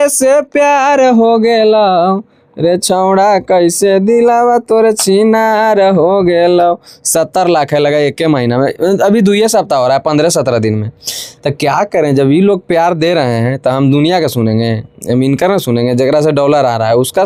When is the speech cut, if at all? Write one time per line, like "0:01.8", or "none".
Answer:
none